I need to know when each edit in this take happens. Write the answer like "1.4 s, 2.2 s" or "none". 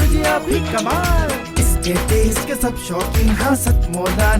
none